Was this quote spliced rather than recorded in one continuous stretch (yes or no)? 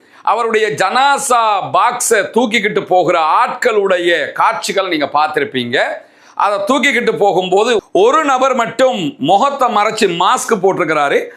no